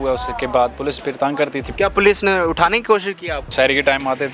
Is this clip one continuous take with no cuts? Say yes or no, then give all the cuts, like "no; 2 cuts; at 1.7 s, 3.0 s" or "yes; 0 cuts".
no; 2 cuts; at 1.6 s, 3.5 s